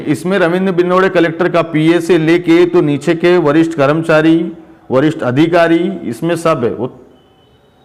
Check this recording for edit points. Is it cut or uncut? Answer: uncut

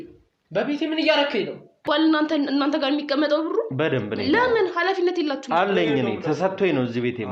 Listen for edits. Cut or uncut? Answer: cut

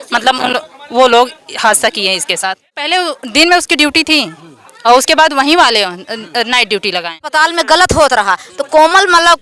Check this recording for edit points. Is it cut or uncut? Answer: cut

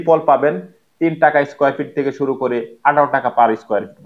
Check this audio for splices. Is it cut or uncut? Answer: uncut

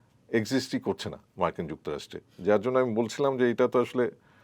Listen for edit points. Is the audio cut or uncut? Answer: uncut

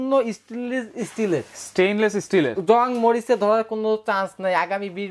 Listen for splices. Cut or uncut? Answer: uncut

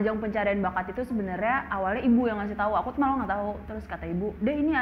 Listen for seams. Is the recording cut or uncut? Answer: uncut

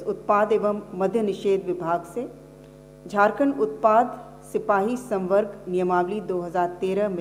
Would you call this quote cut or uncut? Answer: uncut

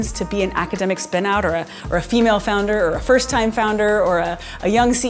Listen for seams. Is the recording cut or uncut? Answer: uncut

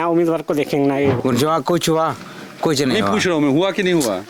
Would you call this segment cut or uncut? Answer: cut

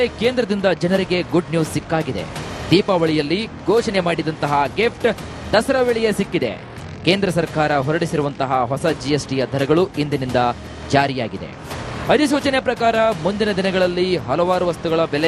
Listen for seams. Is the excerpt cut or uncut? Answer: uncut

